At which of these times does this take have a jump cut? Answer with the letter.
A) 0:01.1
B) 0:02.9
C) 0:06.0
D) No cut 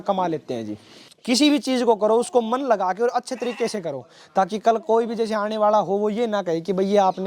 A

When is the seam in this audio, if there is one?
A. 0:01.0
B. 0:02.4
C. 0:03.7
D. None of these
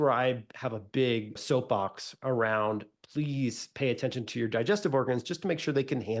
D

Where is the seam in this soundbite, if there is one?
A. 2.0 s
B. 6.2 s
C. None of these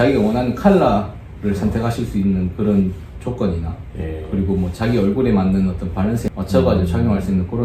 B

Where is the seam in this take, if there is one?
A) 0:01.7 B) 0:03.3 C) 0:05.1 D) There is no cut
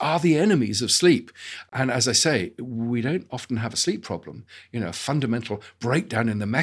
A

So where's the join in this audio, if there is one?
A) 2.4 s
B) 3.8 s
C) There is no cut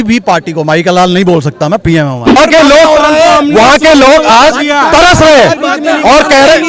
A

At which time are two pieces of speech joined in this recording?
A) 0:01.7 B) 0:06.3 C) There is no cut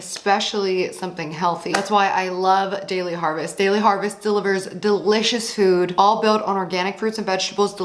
A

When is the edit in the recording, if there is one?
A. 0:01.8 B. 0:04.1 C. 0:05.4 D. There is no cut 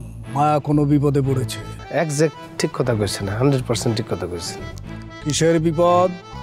A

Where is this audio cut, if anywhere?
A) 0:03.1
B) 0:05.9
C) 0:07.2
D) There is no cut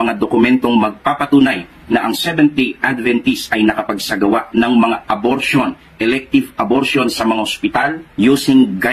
B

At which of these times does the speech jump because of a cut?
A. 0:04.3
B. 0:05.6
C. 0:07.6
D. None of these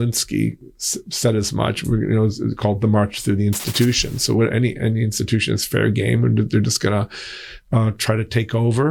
D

